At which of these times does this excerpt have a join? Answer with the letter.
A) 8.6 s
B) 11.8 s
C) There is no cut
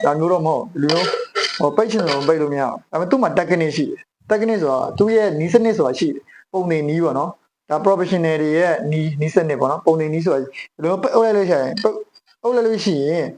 C